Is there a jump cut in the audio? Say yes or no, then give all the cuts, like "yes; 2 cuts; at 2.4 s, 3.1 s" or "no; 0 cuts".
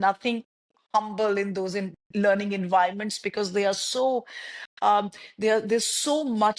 no; 0 cuts